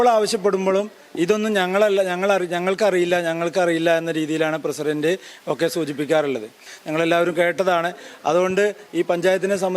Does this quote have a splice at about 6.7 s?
yes; 1 cut; at 6.7 s

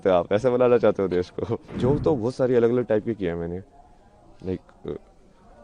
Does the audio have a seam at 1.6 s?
yes; 1 cut; at 1.6 s

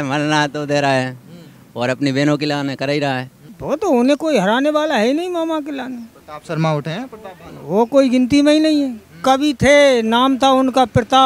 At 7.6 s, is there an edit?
no; 1 cut; at 3.4 s

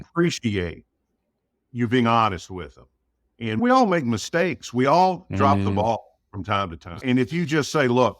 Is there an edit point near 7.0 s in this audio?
yes; 2 cuts; at 3.6 s, 7.0 s

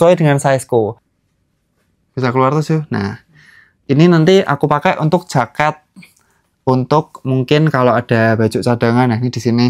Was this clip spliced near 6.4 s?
no; 1 cut; at 1.1 s

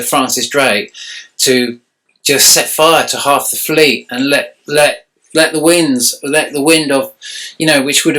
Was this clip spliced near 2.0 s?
no; 0 cuts

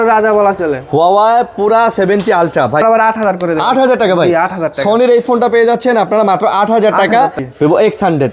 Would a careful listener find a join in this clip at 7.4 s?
yes; 2 cuts; at 2.8 s, 7.4 s

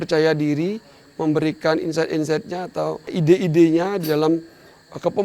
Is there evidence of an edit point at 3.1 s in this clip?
yes; 1 cut; at 3.1 s

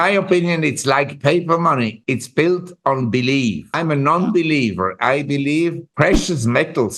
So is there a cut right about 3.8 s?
yes; 3 cuts; at 2.0 s, 3.8 s, 5.8 s

